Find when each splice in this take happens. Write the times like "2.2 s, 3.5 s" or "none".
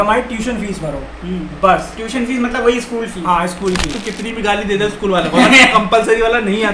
4.0 s